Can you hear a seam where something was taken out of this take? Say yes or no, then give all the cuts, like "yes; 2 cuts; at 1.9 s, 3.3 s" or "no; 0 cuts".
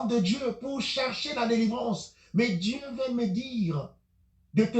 no; 0 cuts